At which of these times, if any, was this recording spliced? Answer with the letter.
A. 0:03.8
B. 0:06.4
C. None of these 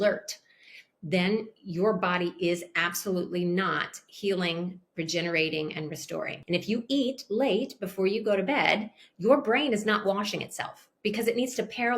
B